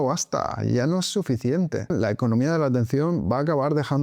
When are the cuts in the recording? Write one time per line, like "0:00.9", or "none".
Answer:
0:01.9